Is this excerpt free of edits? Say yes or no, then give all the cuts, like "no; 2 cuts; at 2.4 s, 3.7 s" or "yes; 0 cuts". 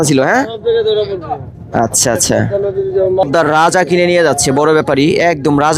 no; 1 cut; at 3.2 s